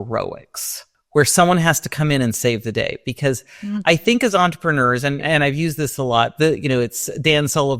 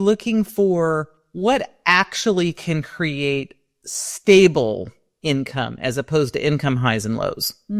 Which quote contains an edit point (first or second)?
first